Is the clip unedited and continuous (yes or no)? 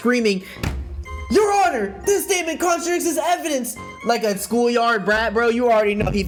yes